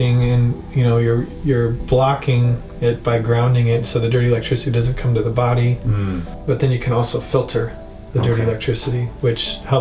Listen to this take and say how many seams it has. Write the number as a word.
one